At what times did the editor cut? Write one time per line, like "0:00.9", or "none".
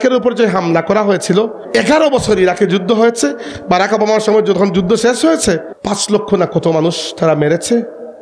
0:01.6
0:05.7

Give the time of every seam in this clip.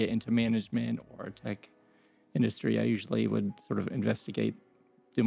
none

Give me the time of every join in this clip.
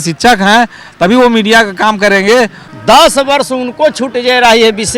0:02.6

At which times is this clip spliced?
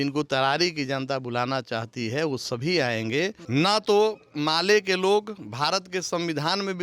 0:03.4

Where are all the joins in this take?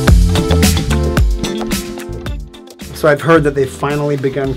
none

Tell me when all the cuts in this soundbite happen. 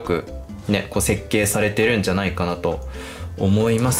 none

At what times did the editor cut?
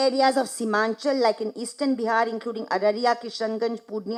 none

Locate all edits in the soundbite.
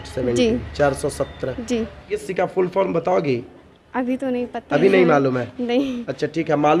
0:02.3

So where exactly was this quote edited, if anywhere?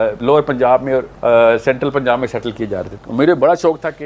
0:01.1
0:02.9

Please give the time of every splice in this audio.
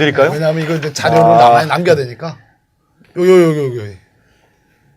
0:04.0

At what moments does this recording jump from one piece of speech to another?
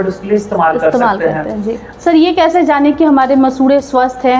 0:01.9

